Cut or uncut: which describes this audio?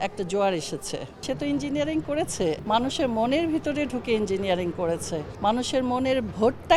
cut